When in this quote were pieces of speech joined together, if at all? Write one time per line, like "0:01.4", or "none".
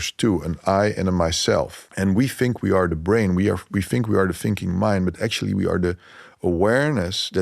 0:01.8